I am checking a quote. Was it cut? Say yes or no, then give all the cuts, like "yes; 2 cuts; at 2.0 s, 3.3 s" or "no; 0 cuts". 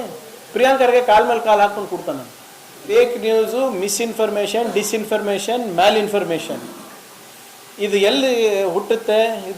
yes; 1 cut; at 2.9 s